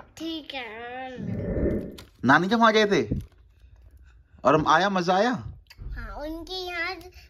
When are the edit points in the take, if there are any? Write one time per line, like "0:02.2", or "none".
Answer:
0:01.2
0:02.2